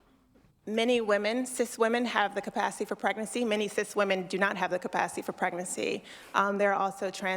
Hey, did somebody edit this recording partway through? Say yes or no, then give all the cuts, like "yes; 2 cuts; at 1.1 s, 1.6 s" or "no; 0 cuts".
yes; 3 cuts; at 1.7 s, 3.2 s, 5.7 s